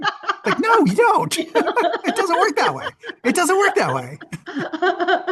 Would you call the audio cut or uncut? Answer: uncut